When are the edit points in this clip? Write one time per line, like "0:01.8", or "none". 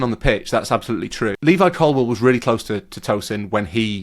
0:01.4